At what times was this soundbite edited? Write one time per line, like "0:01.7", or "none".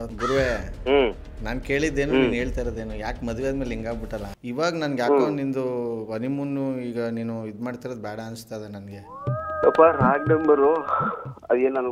0:04.2